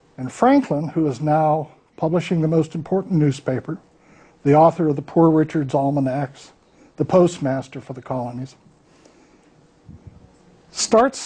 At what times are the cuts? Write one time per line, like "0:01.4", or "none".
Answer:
0:06.4